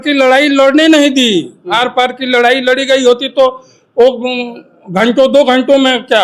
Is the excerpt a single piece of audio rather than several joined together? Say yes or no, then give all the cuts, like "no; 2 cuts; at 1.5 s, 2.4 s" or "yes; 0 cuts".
yes; 0 cuts